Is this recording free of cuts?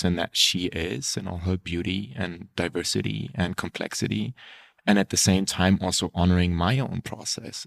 yes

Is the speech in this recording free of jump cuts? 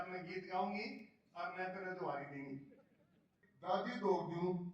no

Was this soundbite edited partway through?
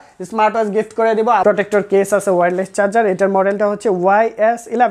yes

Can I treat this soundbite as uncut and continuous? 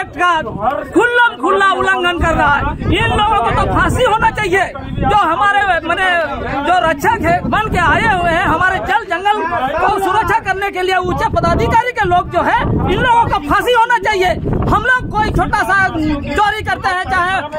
yes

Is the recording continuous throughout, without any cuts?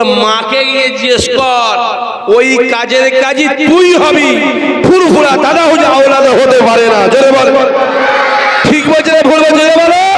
yes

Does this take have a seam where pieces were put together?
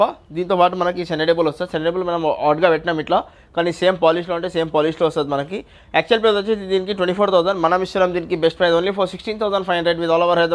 no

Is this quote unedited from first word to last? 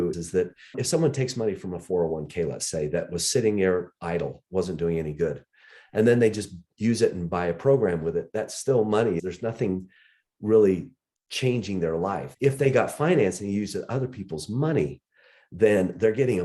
no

